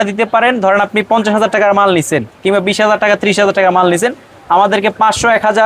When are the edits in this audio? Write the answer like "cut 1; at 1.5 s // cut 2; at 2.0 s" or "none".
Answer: none